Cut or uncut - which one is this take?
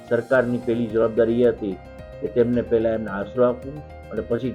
uncut